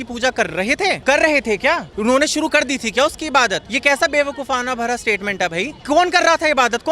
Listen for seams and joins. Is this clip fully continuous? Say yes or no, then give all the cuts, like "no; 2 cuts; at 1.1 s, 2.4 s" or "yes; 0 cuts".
no; 4 cuts; at 1.0 s, 1.9 s, 3.7 s, 5.8 s